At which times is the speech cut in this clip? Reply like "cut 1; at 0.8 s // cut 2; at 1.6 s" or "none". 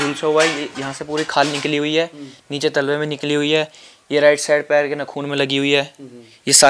none